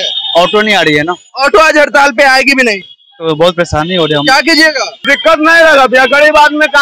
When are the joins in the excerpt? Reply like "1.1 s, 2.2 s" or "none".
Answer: 5.1 s